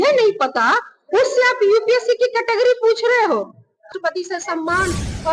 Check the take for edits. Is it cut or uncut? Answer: cut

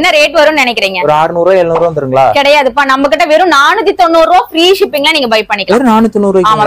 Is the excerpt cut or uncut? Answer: uncut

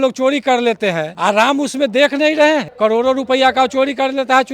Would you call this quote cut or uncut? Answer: cut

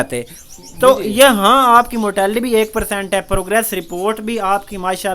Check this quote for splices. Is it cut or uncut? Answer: uncut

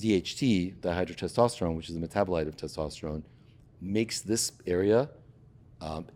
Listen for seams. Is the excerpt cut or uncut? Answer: uncut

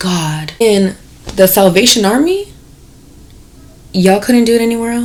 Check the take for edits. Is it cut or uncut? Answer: uncut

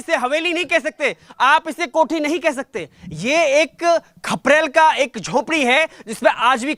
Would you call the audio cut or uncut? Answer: uncut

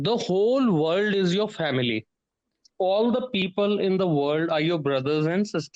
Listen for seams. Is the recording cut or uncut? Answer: uncut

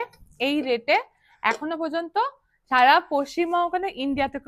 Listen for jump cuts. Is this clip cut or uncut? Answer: uncut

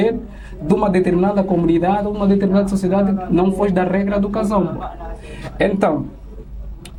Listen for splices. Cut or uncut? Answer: uncut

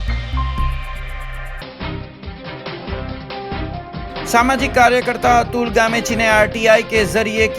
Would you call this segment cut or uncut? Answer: cut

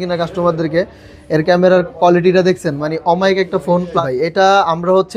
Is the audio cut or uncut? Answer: cut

